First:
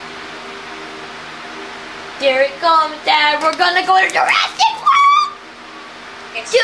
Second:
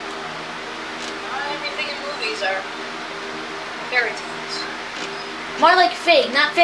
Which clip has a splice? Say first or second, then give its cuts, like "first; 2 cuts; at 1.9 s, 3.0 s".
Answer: second; 1 cut; at 1.4 s